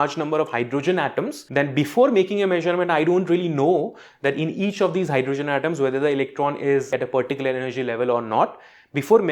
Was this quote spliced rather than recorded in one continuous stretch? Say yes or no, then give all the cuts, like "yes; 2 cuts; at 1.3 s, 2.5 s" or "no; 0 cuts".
yes; 2 cuts; at 1.4 s, 6.9 s